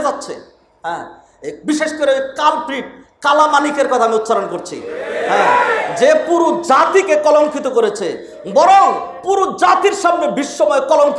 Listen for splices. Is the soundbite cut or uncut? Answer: uncut